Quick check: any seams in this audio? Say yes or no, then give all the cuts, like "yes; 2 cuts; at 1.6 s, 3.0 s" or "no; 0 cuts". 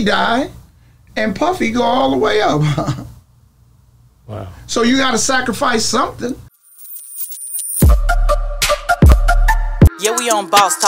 yes; 1 cut; at 6.6 s